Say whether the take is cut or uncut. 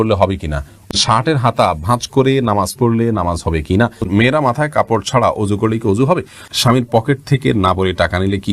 cut